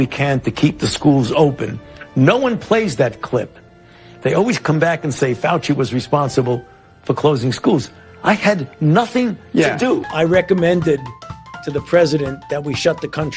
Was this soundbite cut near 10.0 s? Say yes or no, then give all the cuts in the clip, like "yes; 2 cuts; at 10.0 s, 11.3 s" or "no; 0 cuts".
yes; 1 cut; at 10.0 s